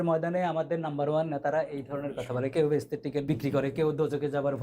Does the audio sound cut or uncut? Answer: cut